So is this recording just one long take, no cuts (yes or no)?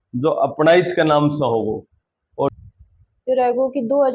no